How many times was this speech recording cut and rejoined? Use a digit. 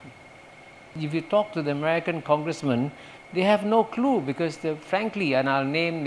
1